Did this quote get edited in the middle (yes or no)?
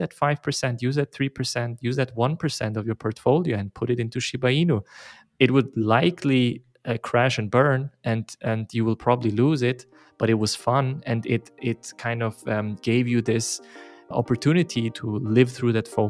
yes